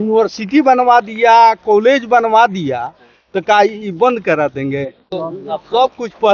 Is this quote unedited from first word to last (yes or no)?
no